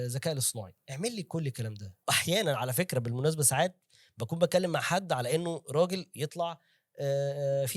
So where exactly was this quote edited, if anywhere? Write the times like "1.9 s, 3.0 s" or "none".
1.8 s